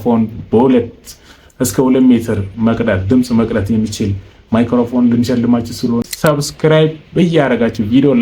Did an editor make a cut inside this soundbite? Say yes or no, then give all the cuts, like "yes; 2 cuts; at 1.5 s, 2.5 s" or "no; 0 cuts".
yes; 1 cut; at 6.1 s